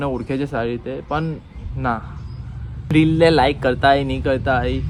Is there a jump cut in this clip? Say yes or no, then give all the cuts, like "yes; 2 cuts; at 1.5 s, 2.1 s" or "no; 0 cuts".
no; 0 cuts